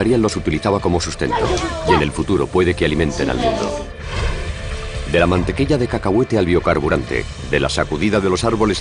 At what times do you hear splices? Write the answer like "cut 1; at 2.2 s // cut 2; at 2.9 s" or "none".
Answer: none